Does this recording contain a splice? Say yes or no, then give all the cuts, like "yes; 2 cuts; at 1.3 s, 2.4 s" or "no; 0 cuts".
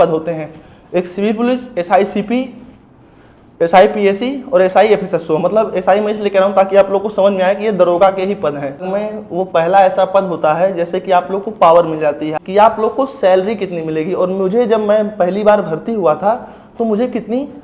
yes; 2 cuts; at 8.9 s, 12.4 s